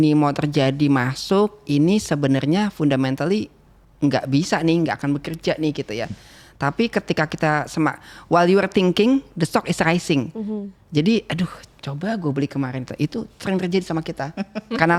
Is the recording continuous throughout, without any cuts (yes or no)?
yes